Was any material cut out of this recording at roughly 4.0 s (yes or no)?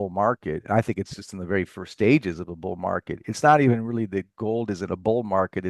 no